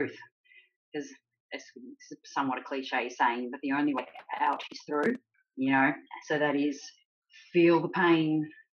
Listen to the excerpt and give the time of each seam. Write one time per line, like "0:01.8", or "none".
0:05.4